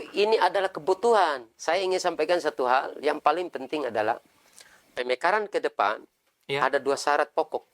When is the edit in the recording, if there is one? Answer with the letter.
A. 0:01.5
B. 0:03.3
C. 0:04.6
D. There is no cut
A